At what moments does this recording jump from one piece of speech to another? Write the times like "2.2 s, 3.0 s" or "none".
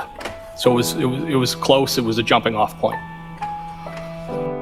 none